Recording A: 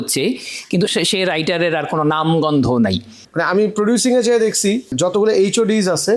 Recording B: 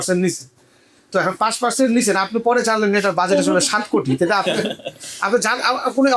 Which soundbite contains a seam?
A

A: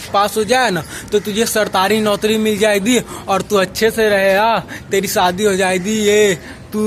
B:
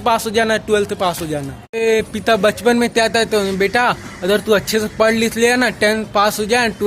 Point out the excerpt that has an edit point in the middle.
B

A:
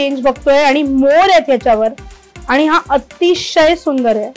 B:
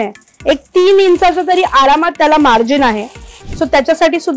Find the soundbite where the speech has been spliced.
B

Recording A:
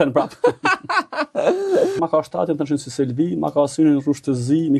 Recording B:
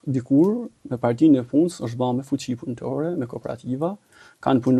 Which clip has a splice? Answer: A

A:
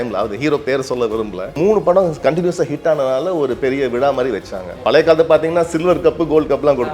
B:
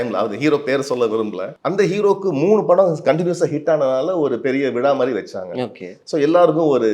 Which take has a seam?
A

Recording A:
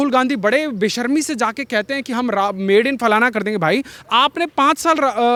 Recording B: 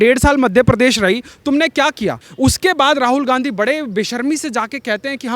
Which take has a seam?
B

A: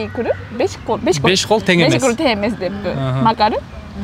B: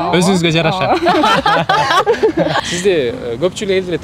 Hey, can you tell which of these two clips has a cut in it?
B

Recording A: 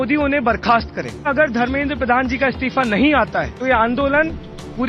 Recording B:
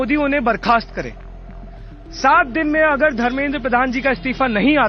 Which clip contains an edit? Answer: A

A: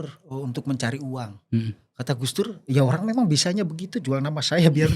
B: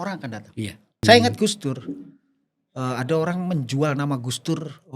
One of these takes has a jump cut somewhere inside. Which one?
B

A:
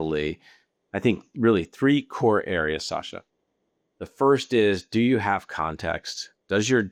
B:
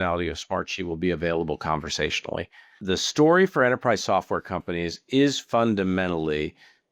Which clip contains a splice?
B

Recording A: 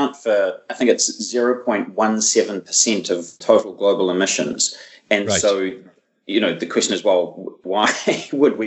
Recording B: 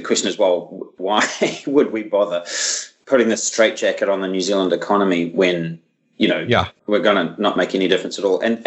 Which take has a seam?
A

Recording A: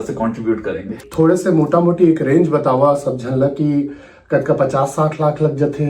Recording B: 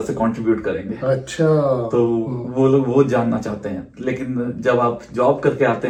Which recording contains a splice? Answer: A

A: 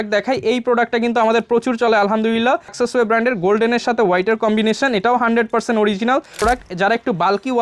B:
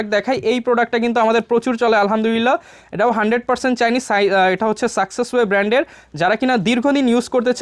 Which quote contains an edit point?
A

